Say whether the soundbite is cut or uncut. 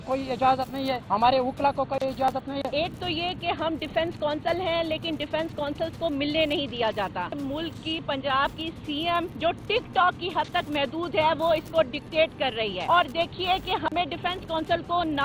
cut